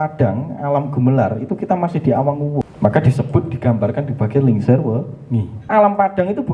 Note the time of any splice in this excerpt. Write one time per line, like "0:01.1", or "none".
0:02.7
0:05.7